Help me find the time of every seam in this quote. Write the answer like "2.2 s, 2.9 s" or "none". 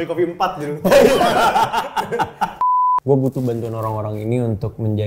2.6 s